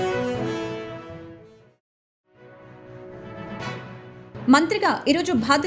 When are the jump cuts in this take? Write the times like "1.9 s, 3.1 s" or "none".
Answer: none